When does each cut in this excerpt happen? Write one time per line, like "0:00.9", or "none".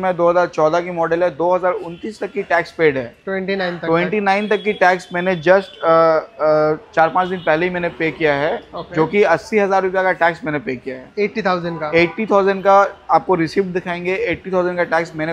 none